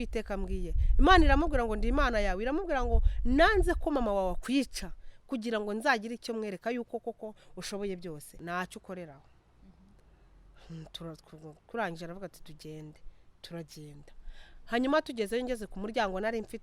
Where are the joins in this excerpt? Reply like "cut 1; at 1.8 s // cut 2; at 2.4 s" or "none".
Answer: cut 1; at 8.3 s

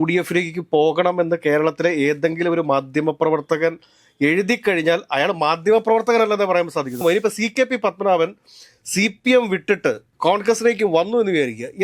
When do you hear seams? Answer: cut 1; at 7.0 s

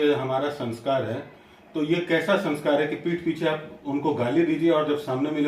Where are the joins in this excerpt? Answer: none

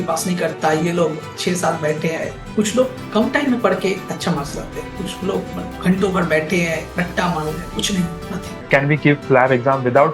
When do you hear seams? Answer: cut 1; at 2.4 s // cut 2; at 8.7 s

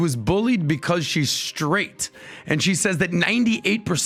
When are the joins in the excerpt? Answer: none

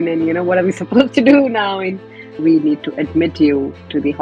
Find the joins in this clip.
cut 1; at 2.2 s

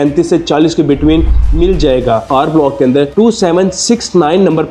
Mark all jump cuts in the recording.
cut 1; at 2.3 s

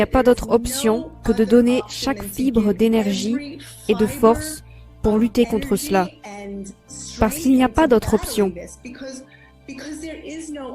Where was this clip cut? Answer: cut 1; at 8.5 s

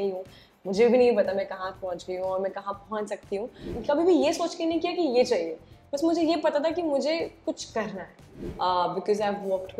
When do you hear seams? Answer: cut 1; at 3.7 s // cut 2; at 8.4 s

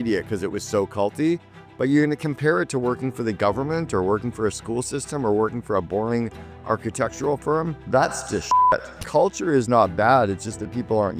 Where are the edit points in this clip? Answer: cut 1; at 7.8 s // cut 2; at 8.9 s

